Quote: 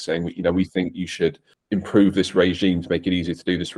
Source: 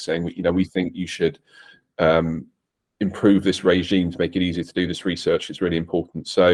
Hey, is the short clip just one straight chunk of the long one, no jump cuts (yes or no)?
no